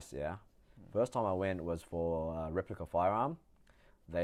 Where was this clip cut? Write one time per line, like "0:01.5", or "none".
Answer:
none